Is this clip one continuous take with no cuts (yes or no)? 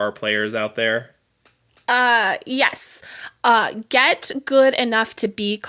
yes